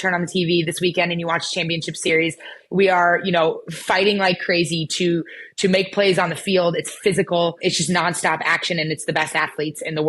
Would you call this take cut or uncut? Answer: cut